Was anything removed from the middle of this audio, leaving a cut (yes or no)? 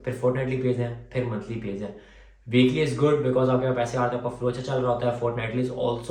no